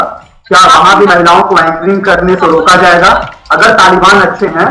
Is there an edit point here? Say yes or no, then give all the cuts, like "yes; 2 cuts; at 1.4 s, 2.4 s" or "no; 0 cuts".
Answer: no; 0 cuts